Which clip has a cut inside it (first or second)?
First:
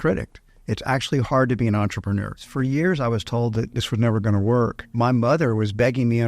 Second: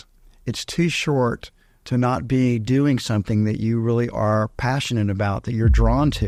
first